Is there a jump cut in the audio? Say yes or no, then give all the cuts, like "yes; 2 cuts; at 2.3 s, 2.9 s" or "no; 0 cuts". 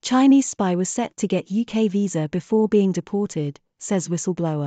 no; 0 cuts